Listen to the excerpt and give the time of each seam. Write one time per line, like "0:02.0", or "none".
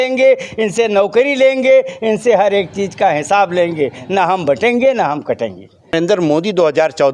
0:05.9

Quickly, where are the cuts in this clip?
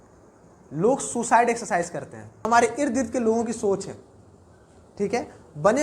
0:02.4

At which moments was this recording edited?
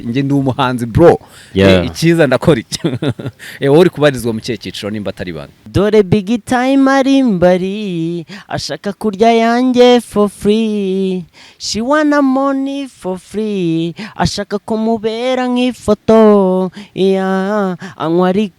0:05.7

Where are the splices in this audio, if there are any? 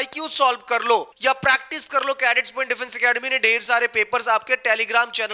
0:01.1

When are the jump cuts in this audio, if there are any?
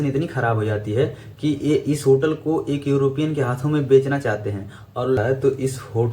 0:05.2

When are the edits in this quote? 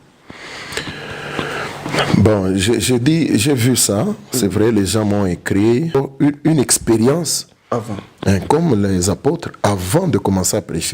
0:05.9

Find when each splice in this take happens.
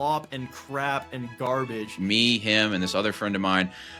0:02.0

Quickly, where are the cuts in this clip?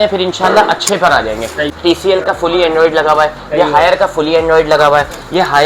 0:01.7

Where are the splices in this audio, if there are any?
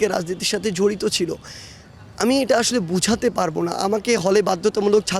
none

